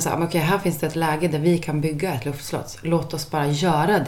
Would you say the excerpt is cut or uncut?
uncut